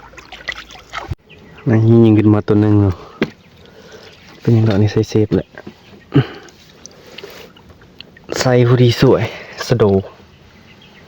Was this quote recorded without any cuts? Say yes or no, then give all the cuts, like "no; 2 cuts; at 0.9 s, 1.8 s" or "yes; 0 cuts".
no; 1 cut; at 1.2 s